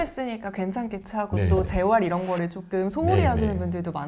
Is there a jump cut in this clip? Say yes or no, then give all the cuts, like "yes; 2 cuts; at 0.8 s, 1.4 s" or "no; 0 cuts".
no; 0 cuts